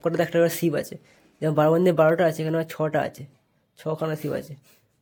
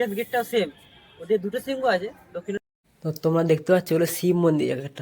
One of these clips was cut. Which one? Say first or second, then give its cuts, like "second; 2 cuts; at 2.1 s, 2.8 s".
second; 1 cut; at 2.6 s